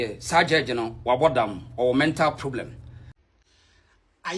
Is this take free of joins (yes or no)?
no